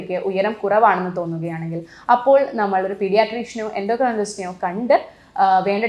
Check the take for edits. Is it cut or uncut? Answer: uncut